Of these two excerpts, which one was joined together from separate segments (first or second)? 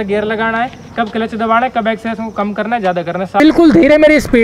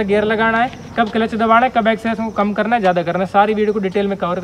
first